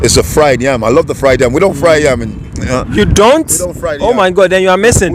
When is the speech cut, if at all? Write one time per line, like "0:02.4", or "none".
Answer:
none